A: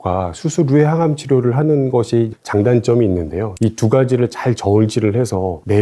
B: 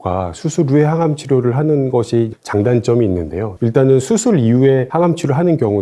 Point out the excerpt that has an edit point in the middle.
A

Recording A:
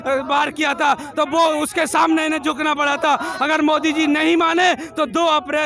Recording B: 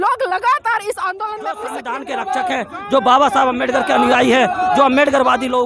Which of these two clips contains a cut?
B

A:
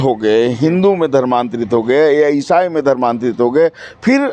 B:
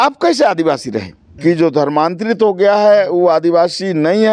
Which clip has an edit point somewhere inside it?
B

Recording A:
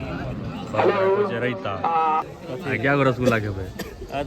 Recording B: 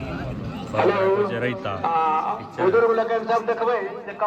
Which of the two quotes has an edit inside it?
A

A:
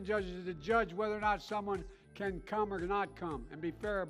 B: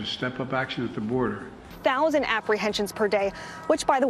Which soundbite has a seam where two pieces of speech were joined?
B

